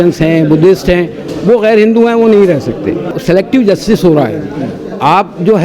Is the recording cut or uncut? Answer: cut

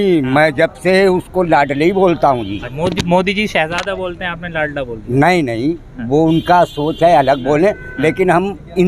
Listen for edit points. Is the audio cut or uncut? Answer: cut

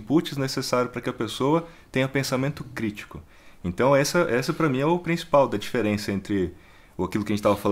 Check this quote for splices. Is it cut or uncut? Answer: uncut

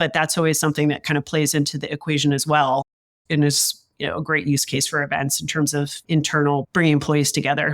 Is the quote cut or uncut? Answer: cut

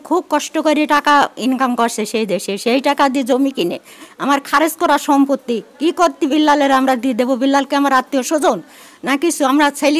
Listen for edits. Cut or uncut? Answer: uncut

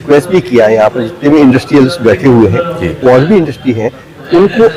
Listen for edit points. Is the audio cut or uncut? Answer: uncut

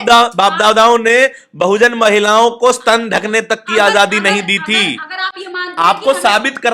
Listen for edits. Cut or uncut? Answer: uncut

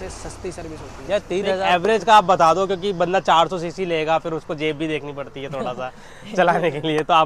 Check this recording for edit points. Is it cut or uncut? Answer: cut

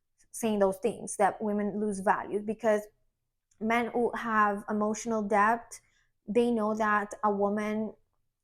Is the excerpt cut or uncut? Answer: uncut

